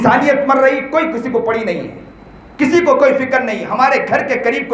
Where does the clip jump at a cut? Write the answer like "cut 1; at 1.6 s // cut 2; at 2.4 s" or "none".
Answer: none